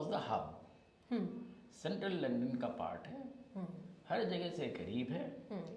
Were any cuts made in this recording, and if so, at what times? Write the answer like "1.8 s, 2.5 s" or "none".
none